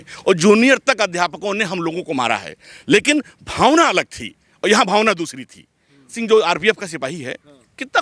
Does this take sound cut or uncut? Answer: cut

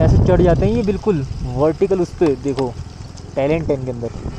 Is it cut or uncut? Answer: uncut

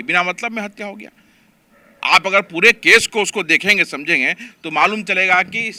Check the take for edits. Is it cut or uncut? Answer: uncut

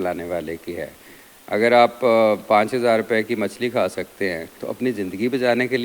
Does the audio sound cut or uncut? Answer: cut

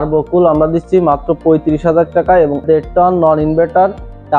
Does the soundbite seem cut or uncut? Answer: cut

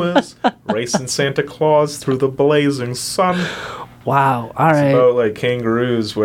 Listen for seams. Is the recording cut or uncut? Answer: uncut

